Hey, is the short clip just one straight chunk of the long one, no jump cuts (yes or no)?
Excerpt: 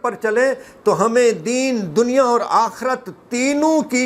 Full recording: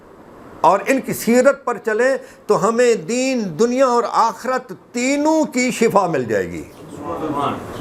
yes